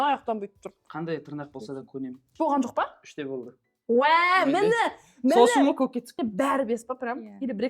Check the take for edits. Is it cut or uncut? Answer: cut